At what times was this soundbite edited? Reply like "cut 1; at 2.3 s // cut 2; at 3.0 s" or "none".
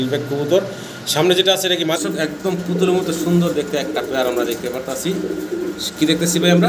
cut 1; at 2.0 s